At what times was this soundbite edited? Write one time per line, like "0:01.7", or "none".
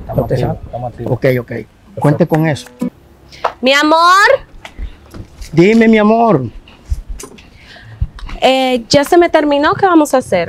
0:02.9